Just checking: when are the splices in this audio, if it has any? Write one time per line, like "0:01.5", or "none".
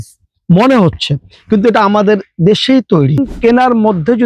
0:03.3